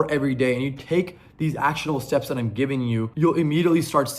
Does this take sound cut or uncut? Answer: cut